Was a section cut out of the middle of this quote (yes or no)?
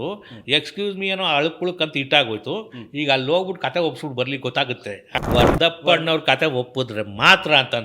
yes